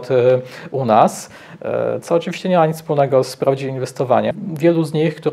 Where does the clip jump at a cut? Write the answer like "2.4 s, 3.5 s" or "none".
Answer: 4.3 s